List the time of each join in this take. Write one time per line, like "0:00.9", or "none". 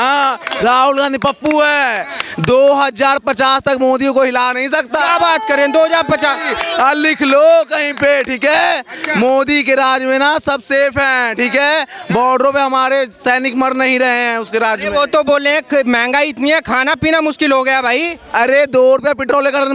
none